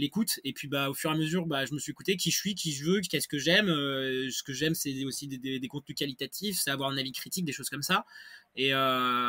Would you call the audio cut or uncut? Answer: uncut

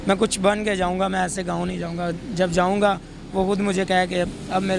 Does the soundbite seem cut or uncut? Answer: uncut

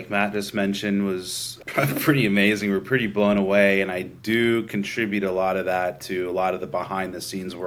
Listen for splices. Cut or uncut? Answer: uncut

